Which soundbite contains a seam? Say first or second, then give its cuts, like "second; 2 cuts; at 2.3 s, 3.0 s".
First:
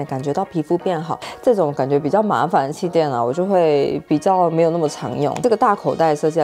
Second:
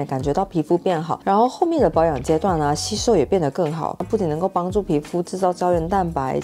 first; 2 cuts; at 1.2 s, 5.4 s